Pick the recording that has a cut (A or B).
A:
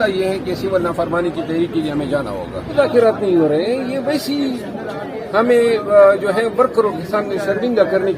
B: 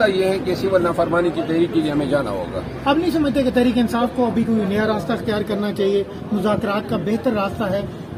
A